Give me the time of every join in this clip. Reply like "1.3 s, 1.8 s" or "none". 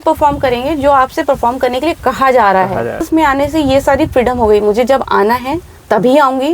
3.0 s

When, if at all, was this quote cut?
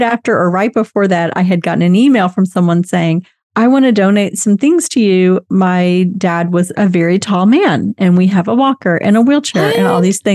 none

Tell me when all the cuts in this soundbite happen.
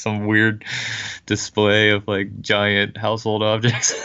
none

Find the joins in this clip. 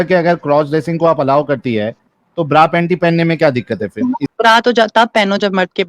4.3 s

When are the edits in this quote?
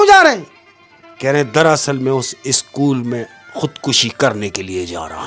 none

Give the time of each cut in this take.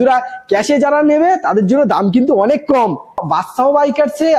3.2 s

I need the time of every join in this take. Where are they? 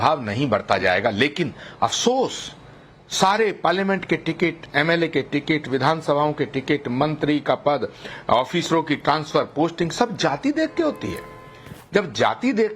2.2 s

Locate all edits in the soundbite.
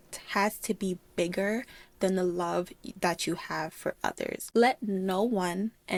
none

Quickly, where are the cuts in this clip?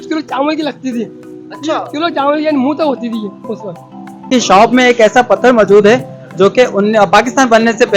4.3 s

